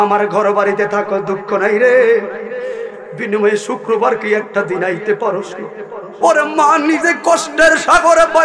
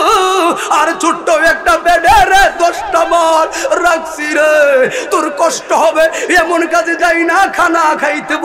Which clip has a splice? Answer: first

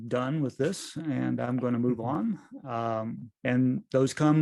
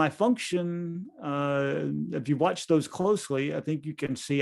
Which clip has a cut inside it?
first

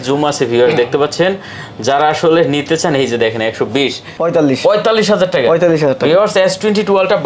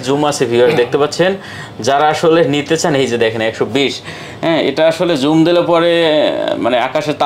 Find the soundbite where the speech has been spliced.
first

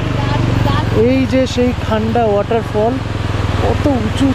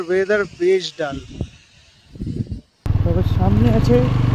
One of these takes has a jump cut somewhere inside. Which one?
second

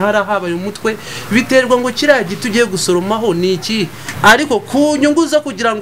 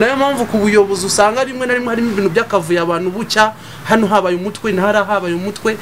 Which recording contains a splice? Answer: first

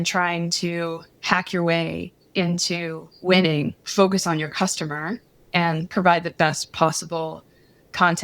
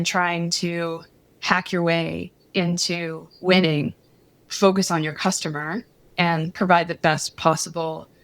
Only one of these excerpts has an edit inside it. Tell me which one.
first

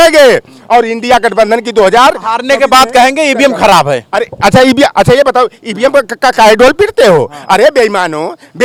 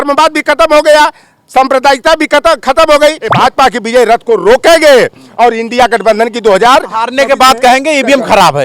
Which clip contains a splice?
second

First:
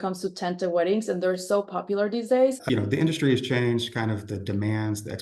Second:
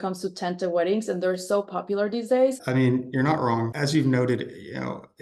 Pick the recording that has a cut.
first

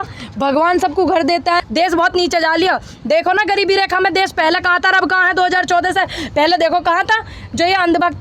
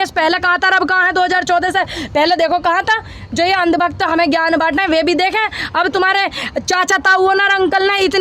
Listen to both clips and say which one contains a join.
first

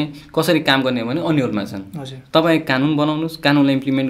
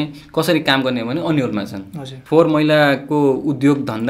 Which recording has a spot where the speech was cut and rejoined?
second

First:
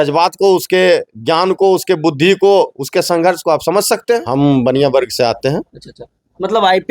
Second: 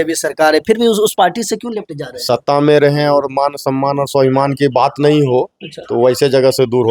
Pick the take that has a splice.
first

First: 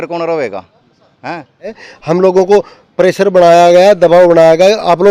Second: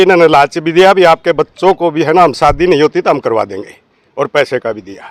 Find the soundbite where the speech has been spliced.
first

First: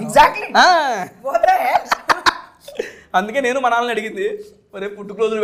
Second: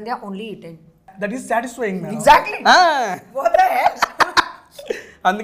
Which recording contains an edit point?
second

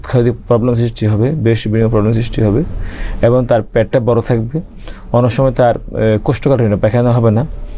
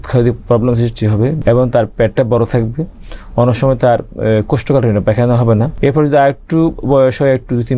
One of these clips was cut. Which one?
second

